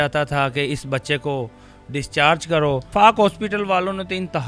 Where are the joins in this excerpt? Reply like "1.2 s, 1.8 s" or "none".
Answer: 2.9 s